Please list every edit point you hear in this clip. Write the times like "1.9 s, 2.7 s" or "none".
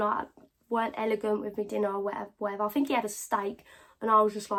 none